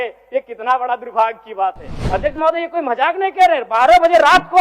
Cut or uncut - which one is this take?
cut